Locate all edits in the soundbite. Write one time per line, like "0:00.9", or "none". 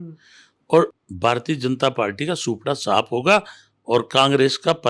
0:00.9

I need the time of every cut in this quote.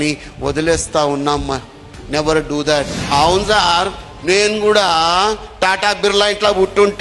0:03.0

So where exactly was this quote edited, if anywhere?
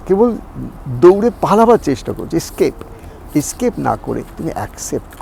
none

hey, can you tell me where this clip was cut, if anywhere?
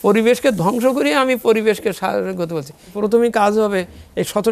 0:02.9

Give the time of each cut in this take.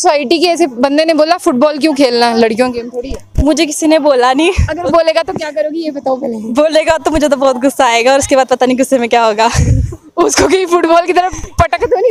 none

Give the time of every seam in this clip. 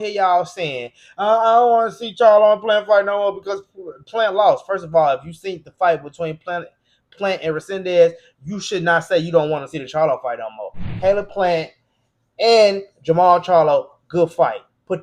0:10.8

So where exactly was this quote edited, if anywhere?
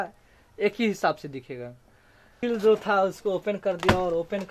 0:02.3

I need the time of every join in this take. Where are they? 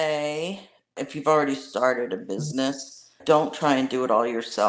0:01.0
0:03.2

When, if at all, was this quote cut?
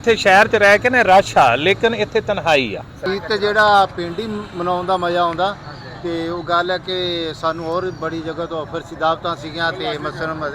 0:03.0

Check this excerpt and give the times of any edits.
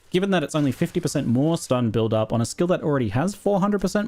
0:02.8

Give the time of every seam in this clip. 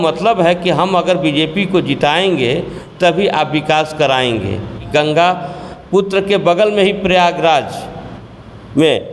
0:04.8

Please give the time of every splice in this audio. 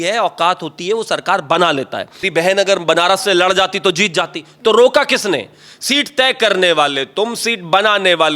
0:02.3

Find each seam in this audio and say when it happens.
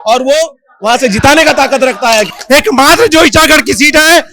0:02.3

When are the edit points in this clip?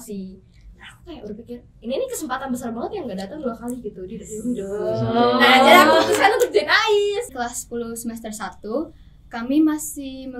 0:07.3

